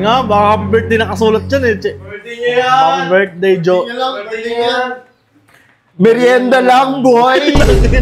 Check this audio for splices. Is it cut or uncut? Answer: uncut